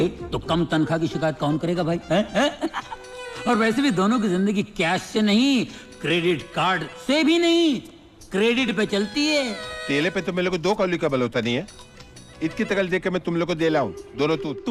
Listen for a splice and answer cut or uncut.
uncut